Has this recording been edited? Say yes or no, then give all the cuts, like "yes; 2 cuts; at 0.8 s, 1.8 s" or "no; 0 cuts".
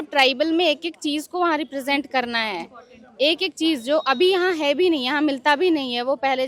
no; 0 cuts